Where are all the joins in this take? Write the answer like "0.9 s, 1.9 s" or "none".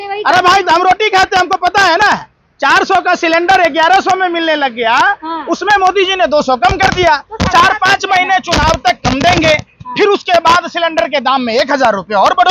none